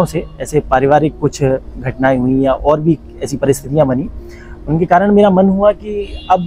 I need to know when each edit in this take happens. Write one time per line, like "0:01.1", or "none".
none